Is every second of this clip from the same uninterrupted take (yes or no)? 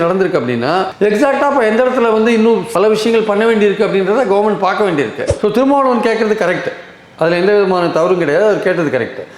no